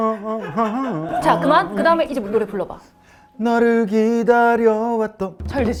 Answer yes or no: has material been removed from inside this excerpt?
no